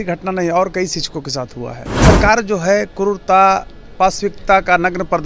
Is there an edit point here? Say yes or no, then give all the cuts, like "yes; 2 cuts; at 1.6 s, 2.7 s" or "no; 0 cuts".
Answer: yes; 1 cut; at 1.9 s